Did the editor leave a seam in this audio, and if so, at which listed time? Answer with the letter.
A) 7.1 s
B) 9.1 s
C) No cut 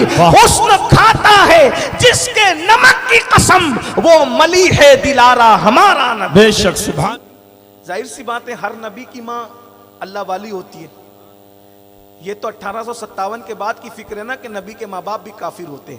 A